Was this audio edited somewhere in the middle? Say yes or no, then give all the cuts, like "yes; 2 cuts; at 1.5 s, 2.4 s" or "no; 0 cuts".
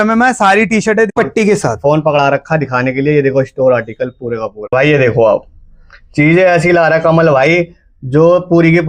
yes; 2 cuts; at 1.1 s, 4.7 s